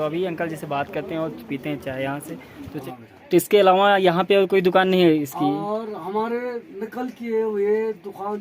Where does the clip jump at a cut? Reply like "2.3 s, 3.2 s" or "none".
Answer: 2.8 s